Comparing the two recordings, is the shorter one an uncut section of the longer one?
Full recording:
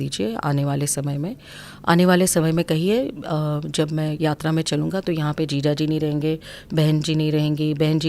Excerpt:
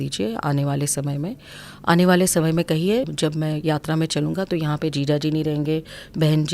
no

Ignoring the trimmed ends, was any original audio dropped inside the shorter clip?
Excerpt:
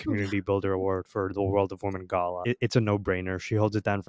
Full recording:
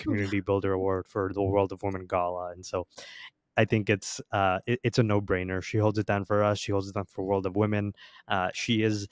yes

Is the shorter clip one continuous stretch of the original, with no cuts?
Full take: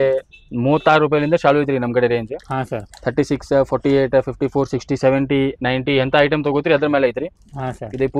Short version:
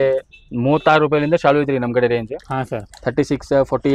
yes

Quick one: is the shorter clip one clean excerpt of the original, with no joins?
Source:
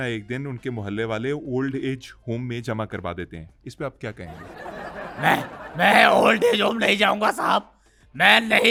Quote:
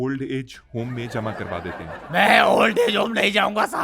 no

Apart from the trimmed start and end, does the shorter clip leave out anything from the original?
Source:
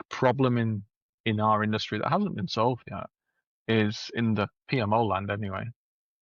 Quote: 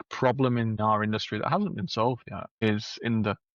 yes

